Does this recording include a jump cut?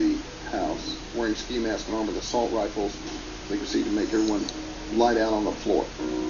yes; 1 cut; at 1.8 s

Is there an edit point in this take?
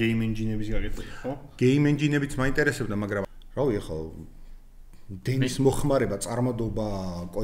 yes; 1 cut; at 3.2 s

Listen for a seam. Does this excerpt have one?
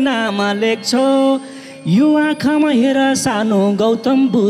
no; 0 cuts

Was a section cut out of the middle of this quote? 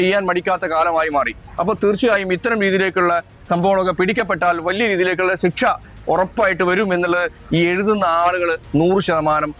no; 0 cuts

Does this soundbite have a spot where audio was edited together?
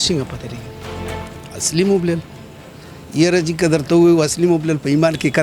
no; 0 cuts

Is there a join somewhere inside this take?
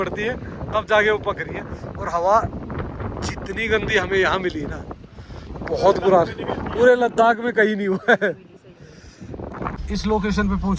yes; 1 cut; at 9.7 s

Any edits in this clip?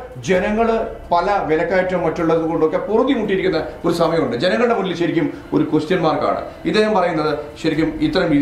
no; 0 cuts

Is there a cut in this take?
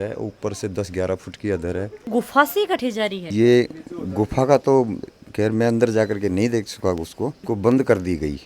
yes; 2 cuts; at 2.0 s, 7.3 s

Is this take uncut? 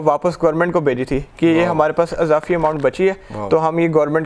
yes; 0 cuts

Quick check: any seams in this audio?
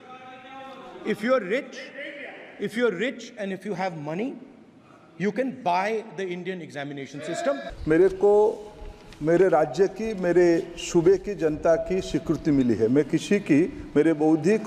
yes; 1 cut; at 7.7 s

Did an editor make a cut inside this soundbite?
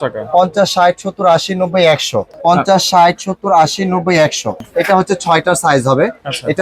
yes; 2 cuts; at 2.3 s, 4.6 s

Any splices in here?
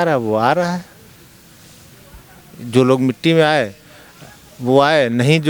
no; 0 cuts

